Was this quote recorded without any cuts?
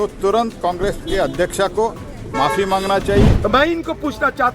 no; 1 cut; at 3.4 s

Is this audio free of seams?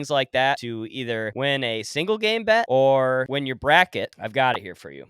no; 4 cuts; at 0.8 s, 2.7 s, 3.3 s, 4.2 s

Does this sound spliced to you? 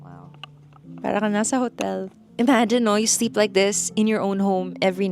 yes; 1 cut; at 2.2 s

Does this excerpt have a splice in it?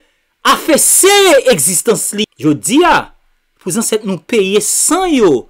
yes; 1 cut; at 2.2 s

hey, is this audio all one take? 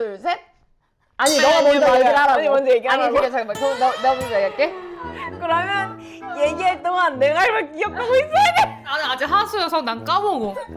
no; 2 cuts; at 4.9 s, 8.9 s

